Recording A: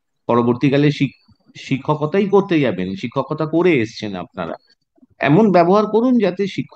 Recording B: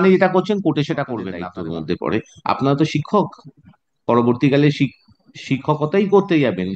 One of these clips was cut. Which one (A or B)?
B